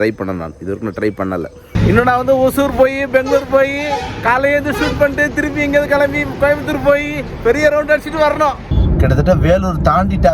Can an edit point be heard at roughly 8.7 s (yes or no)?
yes